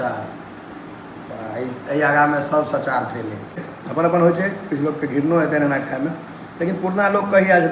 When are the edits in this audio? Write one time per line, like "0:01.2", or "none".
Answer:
0:03.7